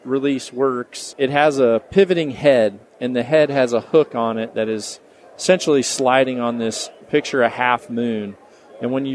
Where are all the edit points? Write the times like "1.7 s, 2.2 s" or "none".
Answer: 1.0 s